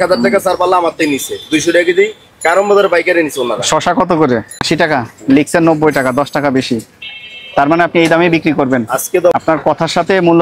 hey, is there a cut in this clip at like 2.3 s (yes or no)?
no